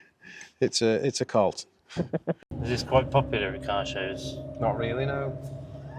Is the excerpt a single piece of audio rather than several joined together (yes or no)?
no